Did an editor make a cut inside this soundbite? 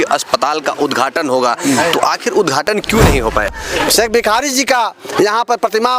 yes; 1 cut; at 3.6 s

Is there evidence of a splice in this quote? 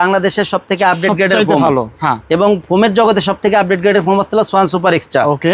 no; 0 cuts

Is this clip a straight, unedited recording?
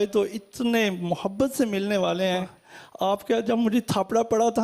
no; 1 cut; at 2.6 s

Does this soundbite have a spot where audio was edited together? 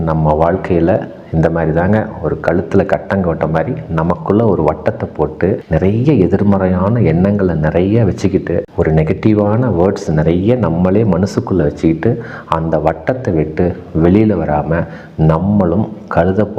no; 0 cuts

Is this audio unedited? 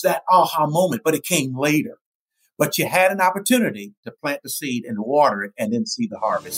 yes; 0 cuts

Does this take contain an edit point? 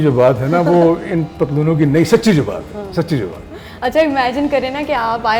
no; 0 cuts

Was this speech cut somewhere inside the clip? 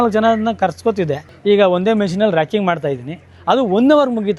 yes; 1 cut; at 1.3 s

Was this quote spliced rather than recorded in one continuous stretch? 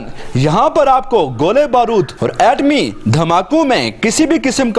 no; 0 cuts

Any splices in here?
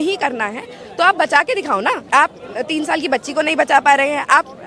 yes; 1 cut; at 2.0 s

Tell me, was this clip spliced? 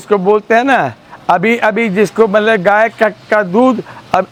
no; 0 cuts

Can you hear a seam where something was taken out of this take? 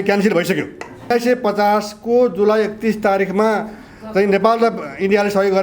yes; 1 cut; at 1.1 s

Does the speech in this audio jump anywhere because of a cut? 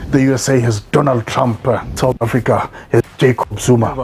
yes; 1 cut; at 1.9 s

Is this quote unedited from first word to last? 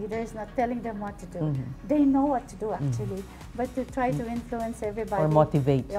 yes; 0 cuts

